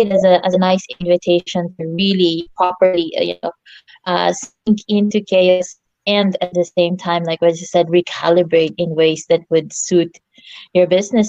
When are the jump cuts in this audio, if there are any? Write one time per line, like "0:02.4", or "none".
none